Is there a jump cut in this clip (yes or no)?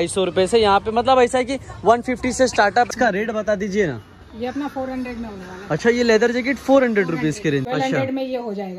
yes